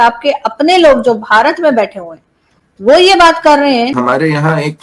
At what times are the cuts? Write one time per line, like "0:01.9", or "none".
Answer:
0:03.9